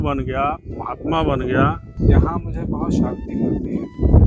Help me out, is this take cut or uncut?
cut